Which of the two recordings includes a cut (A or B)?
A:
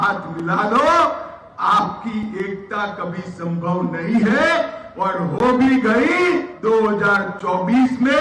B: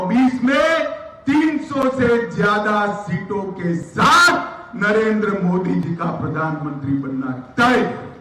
A